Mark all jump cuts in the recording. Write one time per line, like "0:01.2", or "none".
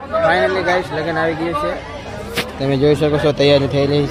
none